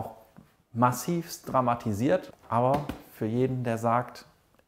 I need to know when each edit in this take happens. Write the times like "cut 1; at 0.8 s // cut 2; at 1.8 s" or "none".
cut 1; at 2.3 s